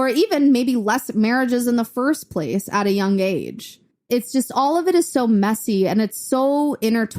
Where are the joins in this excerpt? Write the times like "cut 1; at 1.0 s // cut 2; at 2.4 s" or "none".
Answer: cut 1; at 3.9 s